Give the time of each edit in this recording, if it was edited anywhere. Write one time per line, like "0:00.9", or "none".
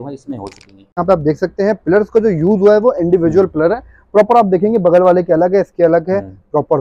0:01.0